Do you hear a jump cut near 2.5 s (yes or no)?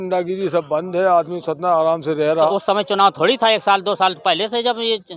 yes